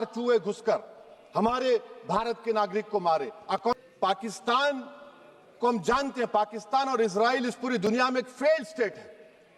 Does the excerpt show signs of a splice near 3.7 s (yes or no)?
yes